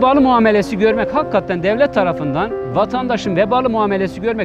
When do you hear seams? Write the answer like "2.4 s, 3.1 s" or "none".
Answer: none